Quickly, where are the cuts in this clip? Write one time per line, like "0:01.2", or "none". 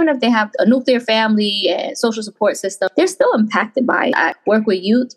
0:02.9
0:04.2